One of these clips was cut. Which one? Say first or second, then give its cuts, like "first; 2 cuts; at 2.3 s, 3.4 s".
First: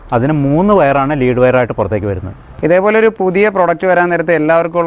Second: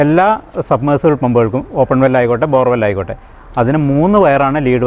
first; 1 cut; at 2.5 s